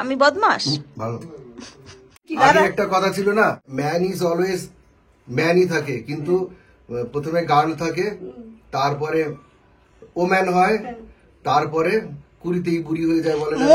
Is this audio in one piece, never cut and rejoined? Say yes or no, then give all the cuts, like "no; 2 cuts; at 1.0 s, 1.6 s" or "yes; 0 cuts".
no; 2 cuts; at 2.3 s, 3.6 s